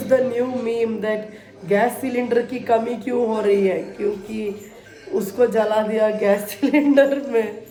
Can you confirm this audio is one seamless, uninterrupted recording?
yes; 0 cuts

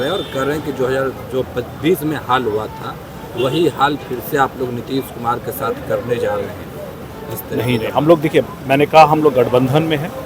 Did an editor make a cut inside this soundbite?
no; 0 cuts

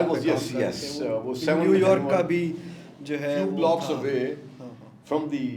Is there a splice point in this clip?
no; 0 cuts

